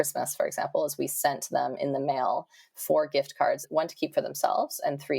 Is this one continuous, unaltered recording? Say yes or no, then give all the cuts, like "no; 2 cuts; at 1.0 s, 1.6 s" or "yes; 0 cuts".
no; 1 cut; at 3.7 s